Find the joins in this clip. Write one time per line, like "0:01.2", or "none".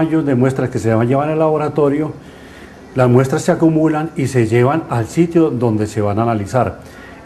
0:01.8